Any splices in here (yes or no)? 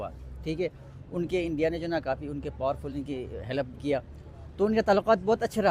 no